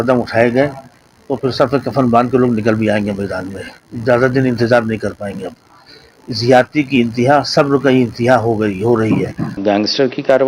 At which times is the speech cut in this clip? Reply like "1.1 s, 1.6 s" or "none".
9.6 s